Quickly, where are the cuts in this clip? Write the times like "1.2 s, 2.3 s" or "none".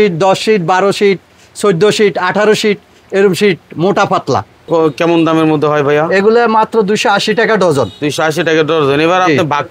4.7 s